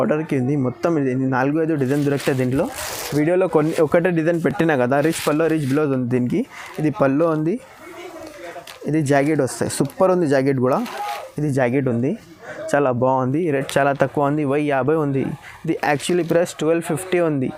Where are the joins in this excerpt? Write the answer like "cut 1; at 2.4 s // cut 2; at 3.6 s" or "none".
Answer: none